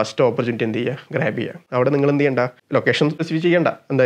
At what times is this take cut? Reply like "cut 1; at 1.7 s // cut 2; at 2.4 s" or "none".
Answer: cut 1; at 1.6 s // cut 2; at 3.1 s